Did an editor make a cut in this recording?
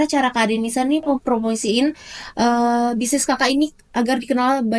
no; 0 cuts

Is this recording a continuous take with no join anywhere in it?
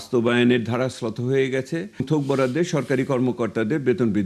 no; 1 cut; at 2.1 s

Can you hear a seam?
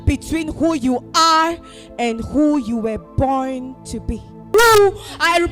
yes; 1 cut; at 4.5 s

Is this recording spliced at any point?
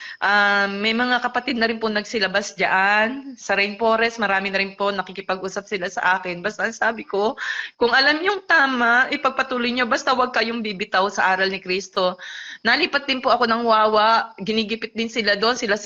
no; 0 cuts

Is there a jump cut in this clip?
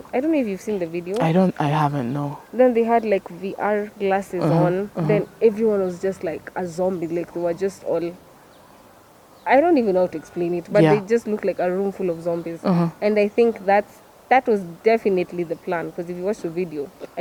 no; 0 cuts

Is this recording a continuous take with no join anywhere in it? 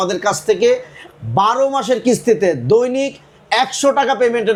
yes; 0 cuts

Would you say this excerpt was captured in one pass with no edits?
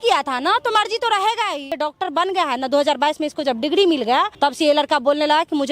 no; 2 cuts; at 1.8 s, 4.3 s

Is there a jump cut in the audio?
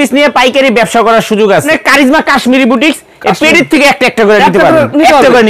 yes; 1 cut; at 1.7 s

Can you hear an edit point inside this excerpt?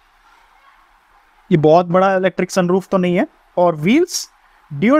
yes; 2 cuts; at 1.1 s, 3.4 s

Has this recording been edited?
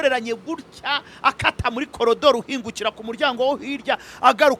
no; 0 cuts

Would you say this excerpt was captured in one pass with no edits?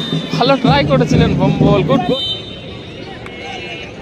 no; 1 cut; at 2.0 s

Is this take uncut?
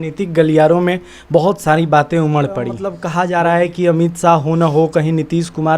no; 1 cut; at 2.9 s

